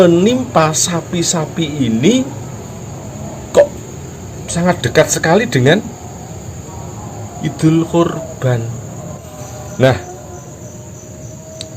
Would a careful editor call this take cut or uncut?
cut